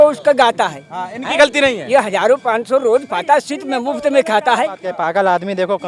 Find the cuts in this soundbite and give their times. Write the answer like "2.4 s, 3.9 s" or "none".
4.9 s

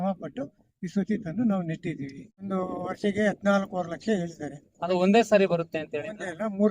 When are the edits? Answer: 2.5 s

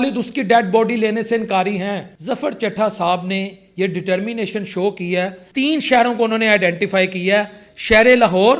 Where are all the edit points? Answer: 2.1 s, 5.4 s

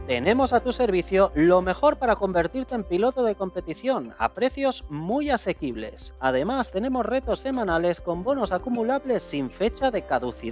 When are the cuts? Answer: 9.5 s

